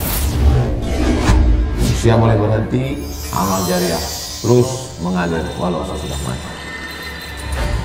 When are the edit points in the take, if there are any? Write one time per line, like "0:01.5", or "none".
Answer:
none